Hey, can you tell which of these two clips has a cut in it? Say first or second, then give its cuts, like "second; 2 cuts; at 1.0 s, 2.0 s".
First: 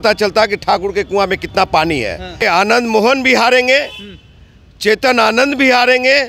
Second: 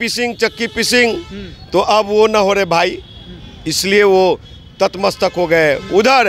first; 1 cut; at 2.4 s